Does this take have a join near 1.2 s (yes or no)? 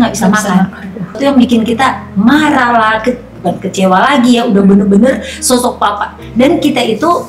yes